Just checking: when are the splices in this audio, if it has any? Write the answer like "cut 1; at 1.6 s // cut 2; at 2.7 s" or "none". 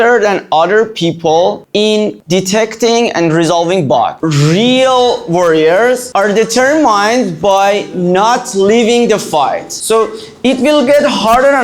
cut 1; at 4.2 s